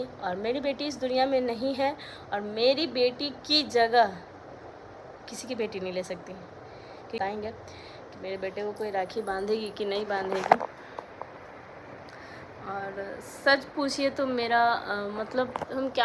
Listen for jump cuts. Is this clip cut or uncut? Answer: cut